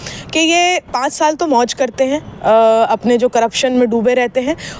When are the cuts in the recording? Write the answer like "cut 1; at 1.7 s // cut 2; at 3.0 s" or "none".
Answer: none